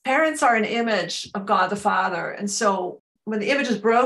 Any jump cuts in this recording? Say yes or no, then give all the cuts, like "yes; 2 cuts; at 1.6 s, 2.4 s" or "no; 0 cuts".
yes; 1 cut; at 2.9 s